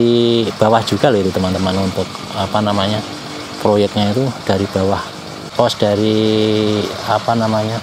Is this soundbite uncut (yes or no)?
no